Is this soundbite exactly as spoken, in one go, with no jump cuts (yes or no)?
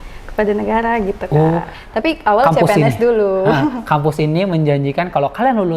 no